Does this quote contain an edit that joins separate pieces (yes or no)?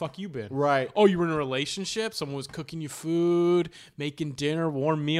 no